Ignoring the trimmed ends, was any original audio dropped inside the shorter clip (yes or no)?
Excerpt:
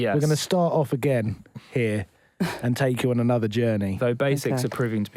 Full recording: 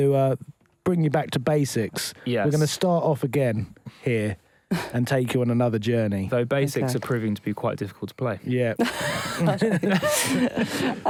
no